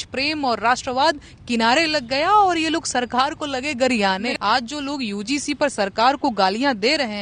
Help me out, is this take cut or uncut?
cut